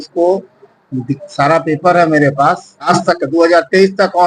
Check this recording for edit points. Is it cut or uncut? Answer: cut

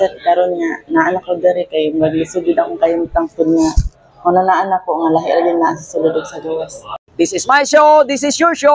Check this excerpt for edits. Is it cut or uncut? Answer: cut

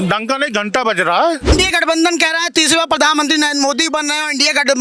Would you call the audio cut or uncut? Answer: cut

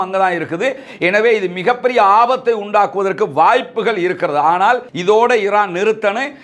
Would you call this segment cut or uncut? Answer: cut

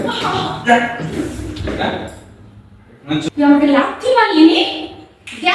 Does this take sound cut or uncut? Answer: uncut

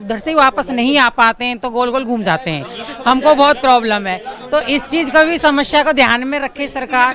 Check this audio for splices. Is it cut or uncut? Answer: uncut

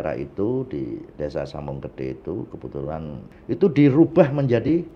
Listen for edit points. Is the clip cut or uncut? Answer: cut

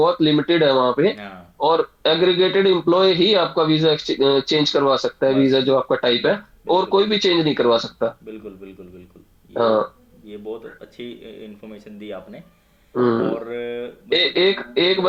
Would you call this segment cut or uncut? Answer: uncut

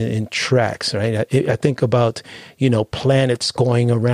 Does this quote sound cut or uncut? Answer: uncut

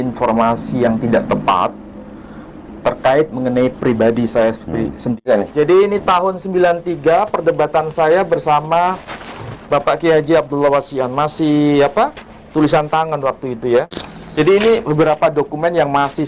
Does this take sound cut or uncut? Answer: cut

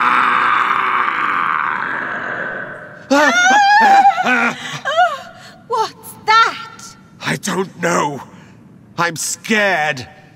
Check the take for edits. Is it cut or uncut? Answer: cut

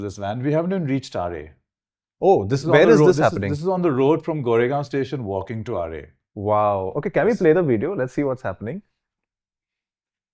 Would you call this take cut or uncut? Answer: uncut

